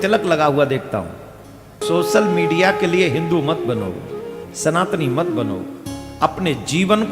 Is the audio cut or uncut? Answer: cut